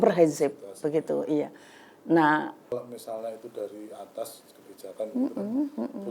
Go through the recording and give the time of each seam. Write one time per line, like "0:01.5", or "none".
0:02.8